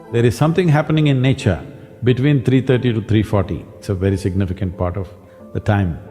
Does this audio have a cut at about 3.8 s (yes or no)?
yes